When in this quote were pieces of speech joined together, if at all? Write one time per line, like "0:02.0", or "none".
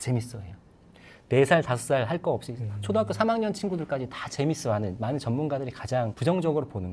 0:05.0